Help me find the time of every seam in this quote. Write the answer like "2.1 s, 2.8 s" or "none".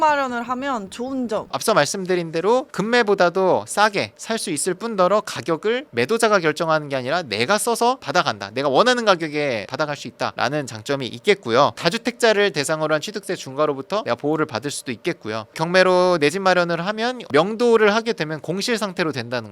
none